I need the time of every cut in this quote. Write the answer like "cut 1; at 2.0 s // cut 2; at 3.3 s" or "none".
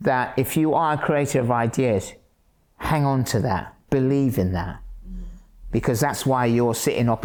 none